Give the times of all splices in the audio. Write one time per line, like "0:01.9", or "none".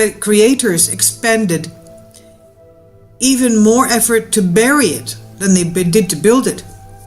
0:05.7